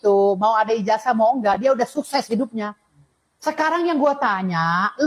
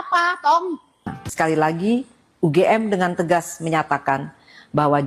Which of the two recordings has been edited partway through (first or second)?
second